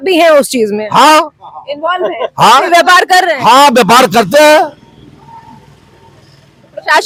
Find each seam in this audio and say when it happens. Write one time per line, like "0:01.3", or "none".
none